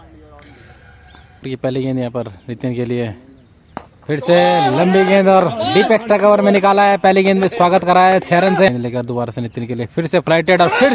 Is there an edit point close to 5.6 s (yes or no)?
no